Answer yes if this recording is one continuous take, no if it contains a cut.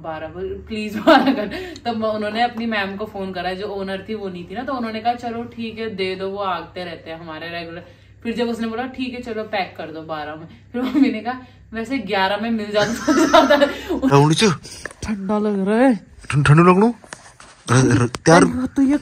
no